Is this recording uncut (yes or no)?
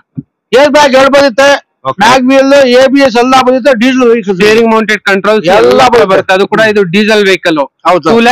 yes